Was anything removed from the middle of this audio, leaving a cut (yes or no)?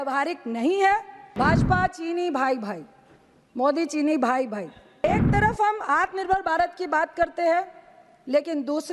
yes